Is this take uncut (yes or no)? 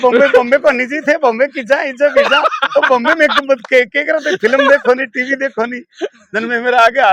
yes